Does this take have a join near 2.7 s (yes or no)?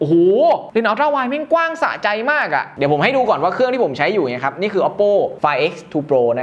yes